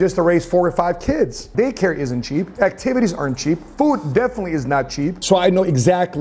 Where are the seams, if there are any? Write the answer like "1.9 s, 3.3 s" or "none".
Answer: 1.5 s, 5.2 s